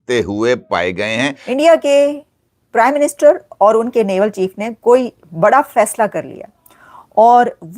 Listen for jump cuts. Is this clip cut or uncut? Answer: cut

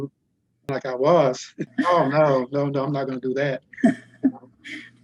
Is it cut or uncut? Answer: cut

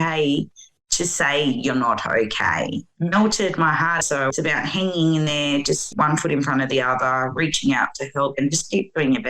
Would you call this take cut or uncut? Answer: cut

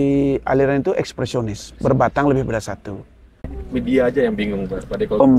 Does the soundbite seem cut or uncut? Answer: cut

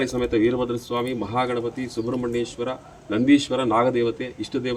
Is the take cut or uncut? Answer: uncut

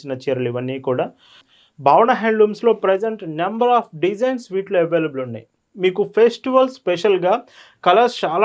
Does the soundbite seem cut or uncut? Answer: cut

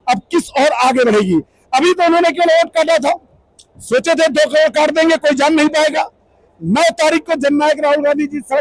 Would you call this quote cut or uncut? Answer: uncut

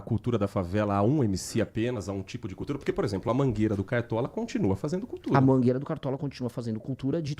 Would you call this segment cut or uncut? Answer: uncut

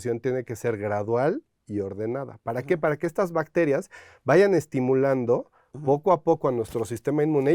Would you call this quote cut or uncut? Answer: uncut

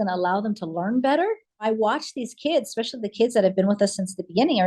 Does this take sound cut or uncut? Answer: cut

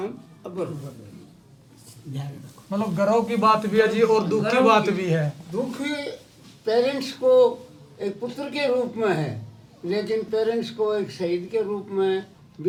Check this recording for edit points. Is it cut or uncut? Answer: uncut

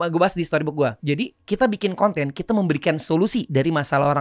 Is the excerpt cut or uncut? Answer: cut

